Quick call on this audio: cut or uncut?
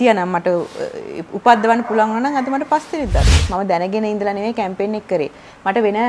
cut